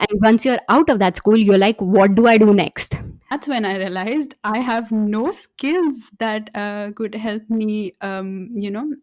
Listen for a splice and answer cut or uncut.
cut